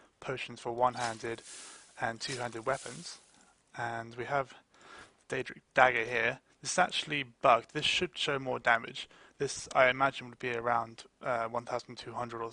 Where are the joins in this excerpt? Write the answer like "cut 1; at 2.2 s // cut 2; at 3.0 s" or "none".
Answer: none

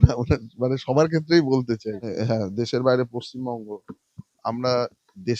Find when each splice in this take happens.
cut 1; at 2.1 s

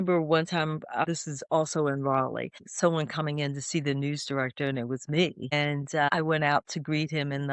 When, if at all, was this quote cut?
cut 1; at 1.0 s // cut 2; at 2.6 s // cut 3; at 6.0 s

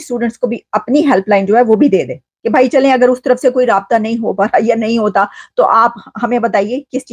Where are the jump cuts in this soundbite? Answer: none

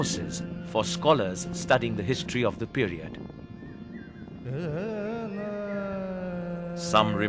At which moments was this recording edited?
cut 1; at 4.4 s

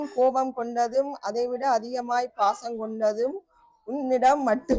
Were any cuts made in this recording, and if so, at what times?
none

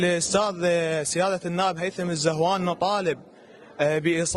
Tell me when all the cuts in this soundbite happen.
none

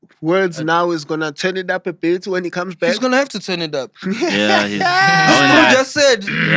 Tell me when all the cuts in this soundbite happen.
none

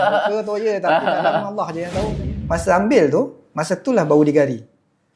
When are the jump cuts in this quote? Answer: cut 1; at 2.1 s

